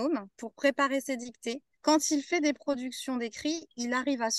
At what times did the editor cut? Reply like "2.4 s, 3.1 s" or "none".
1.7 s